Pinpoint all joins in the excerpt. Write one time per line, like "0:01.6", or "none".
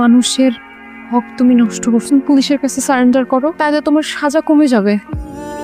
none